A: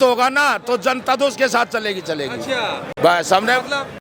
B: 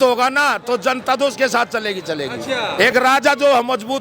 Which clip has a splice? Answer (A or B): B